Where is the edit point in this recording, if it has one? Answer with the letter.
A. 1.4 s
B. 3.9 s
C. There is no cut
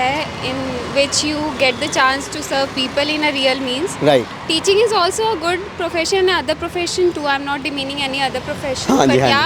C